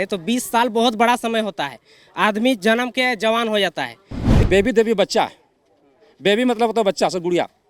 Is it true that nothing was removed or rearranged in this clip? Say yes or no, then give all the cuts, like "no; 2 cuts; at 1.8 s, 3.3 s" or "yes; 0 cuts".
no; 1 cut; at 4.3 s